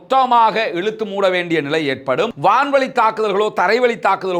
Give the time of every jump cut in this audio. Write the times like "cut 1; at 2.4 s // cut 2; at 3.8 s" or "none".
cut 1; at 2.3 s